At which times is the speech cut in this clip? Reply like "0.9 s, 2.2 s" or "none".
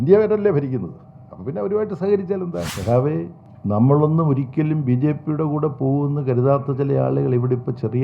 2.7 s, 3.4 s